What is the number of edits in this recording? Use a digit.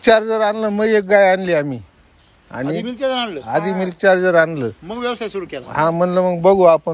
0